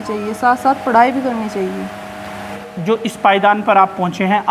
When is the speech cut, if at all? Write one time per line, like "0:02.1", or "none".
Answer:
none